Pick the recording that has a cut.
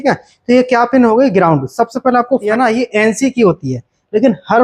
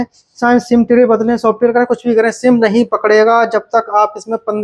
first; 1 cut; at 2.4 s

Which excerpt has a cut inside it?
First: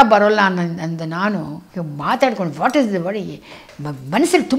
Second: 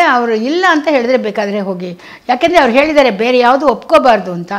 first; 1 cut; at 1.6 s

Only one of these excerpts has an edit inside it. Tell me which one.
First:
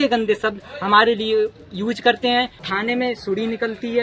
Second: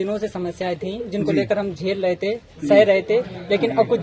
first; 1 cut; at 2.6 s

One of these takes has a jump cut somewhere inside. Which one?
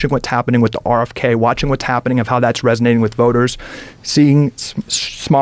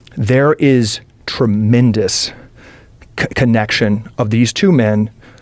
first; 1 cut; at 4.0 s

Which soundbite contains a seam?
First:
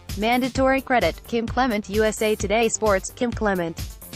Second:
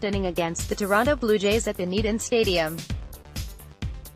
second; 1 cut; at 2.8 s

